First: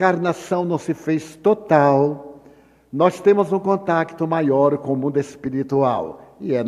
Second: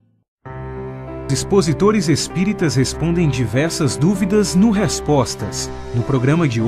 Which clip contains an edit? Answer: first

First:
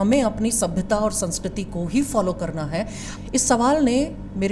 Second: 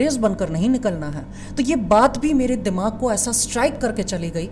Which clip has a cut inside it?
first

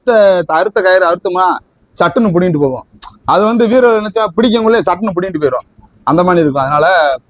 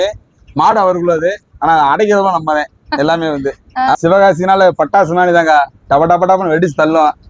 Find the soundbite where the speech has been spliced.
second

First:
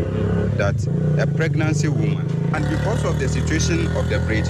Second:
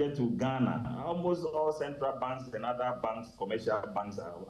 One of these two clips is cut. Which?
first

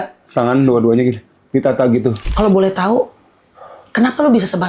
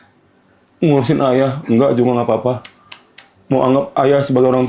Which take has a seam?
first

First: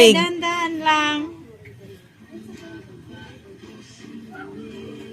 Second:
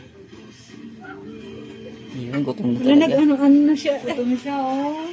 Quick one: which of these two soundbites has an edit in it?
second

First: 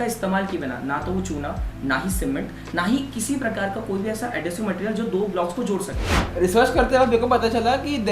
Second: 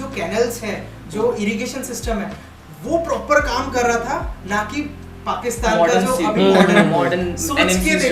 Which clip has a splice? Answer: first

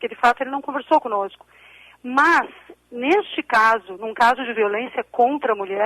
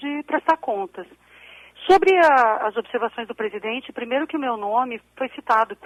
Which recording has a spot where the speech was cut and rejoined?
first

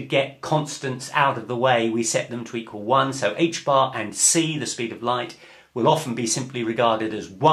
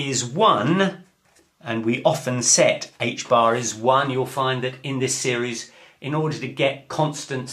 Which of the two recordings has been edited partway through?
second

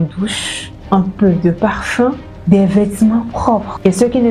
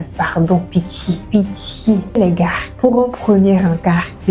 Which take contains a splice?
second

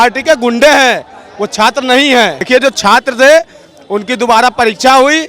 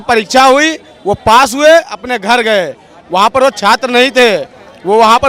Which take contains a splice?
first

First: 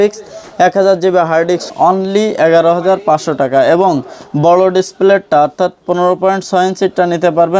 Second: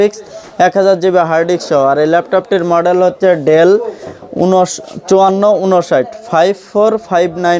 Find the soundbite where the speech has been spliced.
first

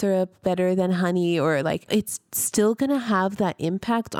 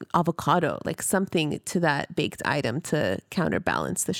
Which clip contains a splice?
first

